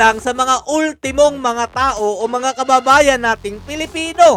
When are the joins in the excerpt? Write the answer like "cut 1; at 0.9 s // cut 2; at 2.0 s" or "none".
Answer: none